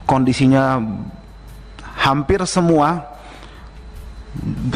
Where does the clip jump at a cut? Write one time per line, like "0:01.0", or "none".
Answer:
none